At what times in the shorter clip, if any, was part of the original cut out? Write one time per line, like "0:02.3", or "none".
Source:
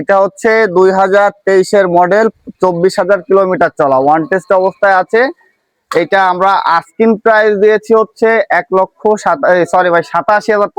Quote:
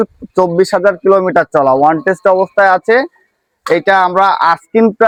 none